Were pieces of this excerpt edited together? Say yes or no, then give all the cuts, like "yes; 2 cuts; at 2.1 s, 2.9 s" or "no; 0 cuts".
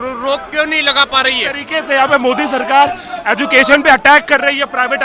yes; 1 cut; at 1.6 s